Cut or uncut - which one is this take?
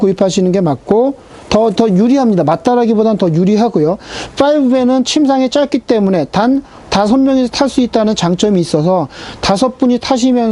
uncut